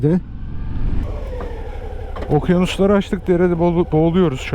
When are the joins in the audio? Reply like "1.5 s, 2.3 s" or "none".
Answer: 1.1 s